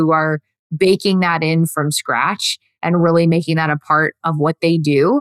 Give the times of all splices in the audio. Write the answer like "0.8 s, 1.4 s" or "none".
4.2 s